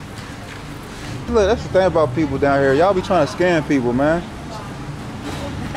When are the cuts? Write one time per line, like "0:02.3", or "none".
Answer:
0:01.2